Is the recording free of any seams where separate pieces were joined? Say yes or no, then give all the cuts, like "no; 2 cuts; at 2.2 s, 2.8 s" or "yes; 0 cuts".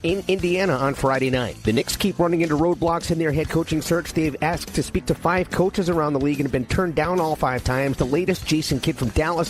no; 1 cut; at 1.5 s